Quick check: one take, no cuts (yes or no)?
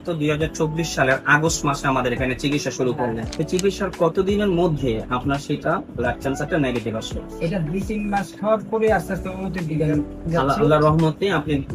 no